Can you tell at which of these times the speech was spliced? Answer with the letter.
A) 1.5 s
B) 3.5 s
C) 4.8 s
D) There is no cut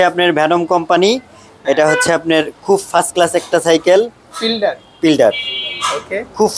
D